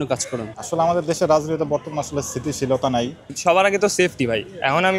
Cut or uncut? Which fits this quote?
cut